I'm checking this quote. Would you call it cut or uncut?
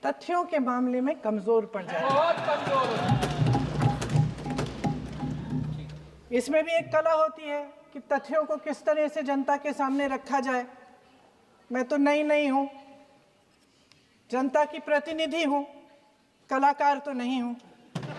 uncut